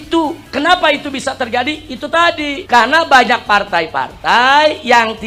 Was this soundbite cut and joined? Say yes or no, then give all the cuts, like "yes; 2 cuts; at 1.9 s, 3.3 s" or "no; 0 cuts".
no; 0 cuts